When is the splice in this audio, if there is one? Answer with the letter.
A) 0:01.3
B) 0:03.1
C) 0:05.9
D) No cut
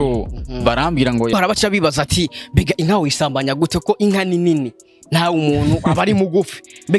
A